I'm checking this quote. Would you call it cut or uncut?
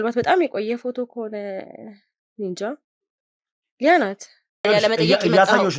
cut